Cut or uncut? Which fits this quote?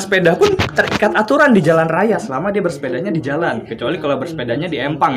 uncut